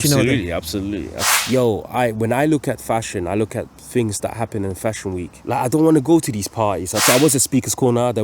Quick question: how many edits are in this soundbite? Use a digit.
3